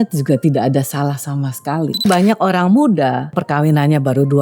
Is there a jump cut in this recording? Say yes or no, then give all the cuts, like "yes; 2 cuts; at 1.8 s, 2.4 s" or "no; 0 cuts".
yes; 2 cuts; at 2.0 s, 3.4 s